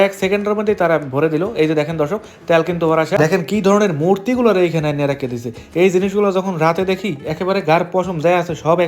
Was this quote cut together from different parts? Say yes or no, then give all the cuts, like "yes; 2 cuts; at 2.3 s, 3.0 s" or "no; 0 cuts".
yes; 1 cut; at 3.2 s